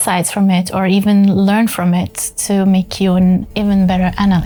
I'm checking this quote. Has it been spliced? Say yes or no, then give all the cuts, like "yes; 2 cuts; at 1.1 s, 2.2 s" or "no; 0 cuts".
no; 0 cuts